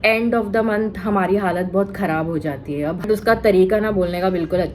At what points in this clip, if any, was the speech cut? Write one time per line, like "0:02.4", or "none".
0:03.1